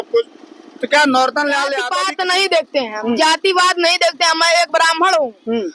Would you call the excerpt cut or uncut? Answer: cut